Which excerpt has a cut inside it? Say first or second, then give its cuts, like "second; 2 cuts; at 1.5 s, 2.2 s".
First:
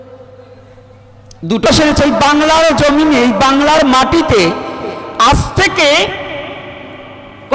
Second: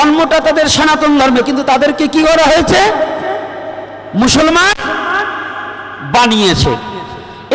first; 1 cut; at 1.7 s